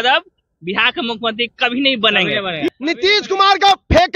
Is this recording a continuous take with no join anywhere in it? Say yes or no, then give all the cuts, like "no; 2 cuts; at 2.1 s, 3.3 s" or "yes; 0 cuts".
no; 1 cut; at 2.6 s